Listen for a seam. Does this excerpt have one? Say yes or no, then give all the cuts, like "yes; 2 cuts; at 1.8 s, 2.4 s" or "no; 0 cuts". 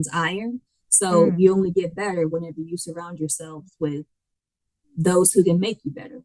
no; 0 cuts